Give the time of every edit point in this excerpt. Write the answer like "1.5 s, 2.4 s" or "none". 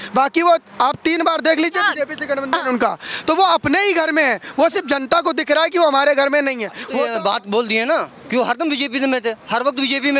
6.9 s